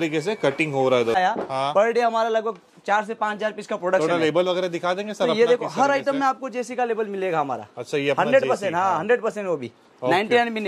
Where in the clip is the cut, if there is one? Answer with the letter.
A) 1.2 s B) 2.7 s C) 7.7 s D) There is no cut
A